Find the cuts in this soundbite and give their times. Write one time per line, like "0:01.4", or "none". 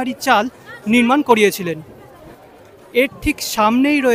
none